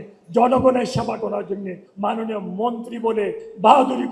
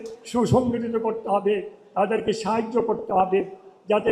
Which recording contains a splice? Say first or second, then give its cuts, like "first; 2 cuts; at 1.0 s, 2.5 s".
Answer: first; 1 cut; at 1.8 s